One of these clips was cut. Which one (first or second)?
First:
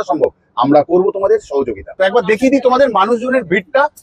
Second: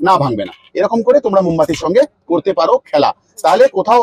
first